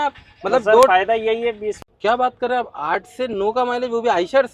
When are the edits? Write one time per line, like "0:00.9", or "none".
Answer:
0:01.9